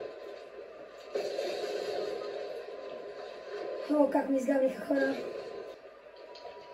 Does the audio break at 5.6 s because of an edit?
yes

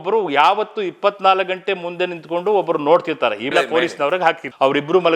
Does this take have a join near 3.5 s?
yes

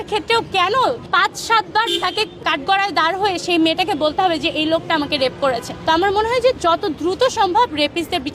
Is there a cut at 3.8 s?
no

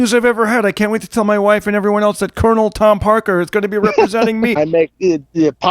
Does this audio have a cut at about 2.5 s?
no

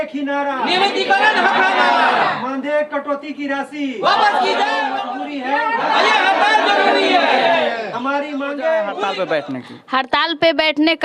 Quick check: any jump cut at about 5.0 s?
yes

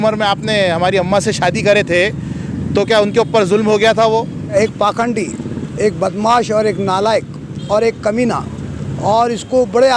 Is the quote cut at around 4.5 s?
yes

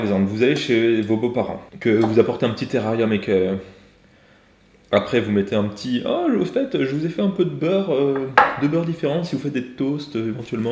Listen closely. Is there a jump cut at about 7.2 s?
no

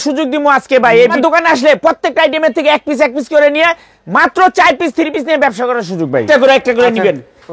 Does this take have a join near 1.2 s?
yes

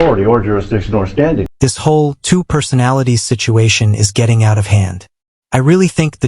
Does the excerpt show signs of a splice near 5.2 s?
no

